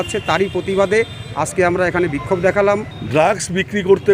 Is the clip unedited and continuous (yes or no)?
no